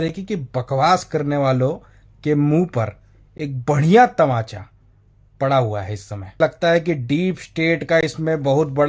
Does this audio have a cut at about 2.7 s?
no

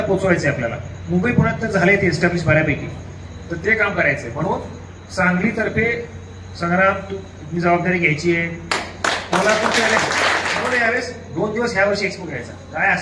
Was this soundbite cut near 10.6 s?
yes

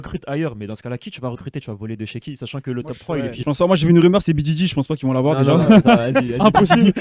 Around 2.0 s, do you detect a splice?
no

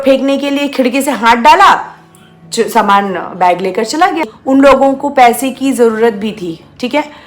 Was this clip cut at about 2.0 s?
no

